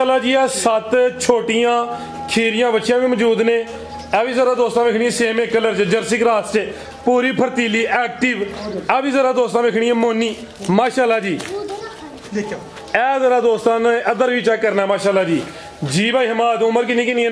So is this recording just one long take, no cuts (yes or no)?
yes